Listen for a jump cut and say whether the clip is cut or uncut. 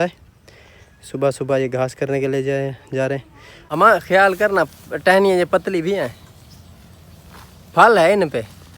cut